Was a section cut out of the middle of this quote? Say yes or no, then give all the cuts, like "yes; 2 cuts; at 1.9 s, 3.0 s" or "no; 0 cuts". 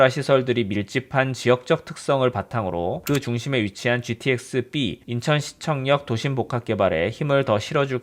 no; 0 cuts